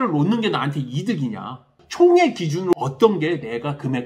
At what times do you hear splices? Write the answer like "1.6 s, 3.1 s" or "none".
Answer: 1.8 s, 2.7 s